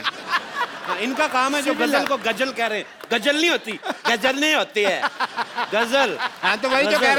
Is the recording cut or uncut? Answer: uncut